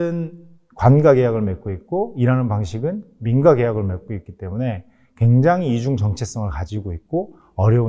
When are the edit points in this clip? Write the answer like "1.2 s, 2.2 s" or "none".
none